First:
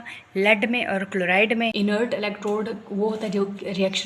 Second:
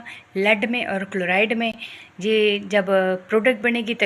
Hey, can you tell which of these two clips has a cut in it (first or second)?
first